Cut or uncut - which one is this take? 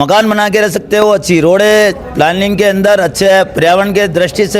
uncut